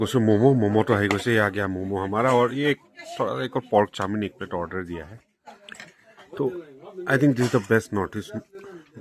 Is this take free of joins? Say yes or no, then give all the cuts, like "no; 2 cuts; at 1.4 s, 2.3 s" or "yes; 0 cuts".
yes; 0 cuts